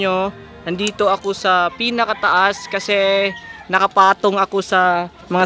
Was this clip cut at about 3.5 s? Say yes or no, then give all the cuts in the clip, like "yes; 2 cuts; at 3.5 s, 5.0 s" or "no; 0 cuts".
no; 0 cuts